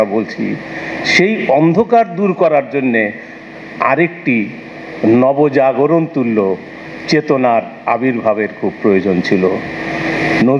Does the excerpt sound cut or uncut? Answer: uncut